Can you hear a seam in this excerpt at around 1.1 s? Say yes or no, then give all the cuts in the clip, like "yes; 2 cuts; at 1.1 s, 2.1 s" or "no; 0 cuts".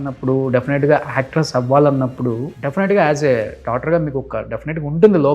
no; 1 cut; at 2.5 s